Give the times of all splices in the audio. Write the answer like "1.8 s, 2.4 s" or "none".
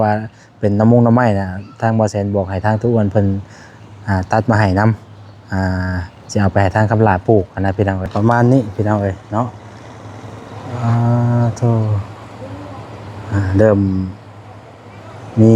8.1 s